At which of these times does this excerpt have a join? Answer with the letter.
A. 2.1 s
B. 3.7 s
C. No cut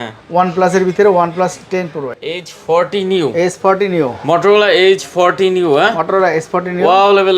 A